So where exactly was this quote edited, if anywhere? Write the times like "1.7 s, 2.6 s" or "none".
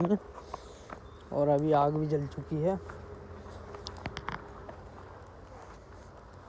none